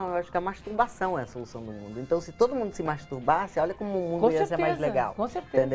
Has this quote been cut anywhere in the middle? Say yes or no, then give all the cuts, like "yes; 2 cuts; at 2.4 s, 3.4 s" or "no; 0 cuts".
no; 0 cuts